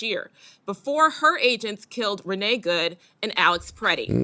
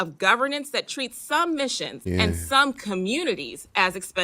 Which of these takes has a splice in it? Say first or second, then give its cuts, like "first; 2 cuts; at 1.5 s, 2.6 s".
second; 1 cut; at 1.9 s